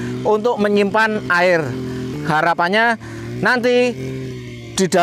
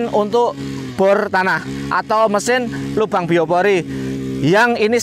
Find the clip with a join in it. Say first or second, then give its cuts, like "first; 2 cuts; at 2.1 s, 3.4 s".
first; 1 cut; at 2.1 s